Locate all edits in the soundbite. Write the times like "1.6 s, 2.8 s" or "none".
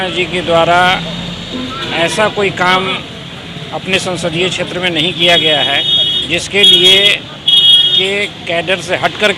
none